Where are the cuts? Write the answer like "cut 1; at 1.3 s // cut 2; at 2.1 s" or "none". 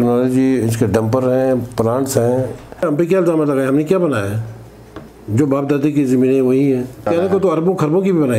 cut 1; at 2.8 s